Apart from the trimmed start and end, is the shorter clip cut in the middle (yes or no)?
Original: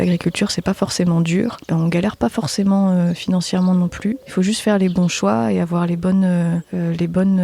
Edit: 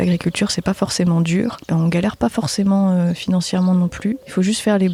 no